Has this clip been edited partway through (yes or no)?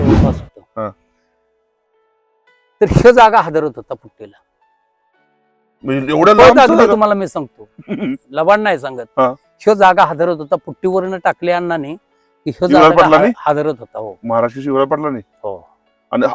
no